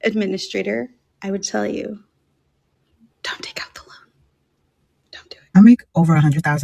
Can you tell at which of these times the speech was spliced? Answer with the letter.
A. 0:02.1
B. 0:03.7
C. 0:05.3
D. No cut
C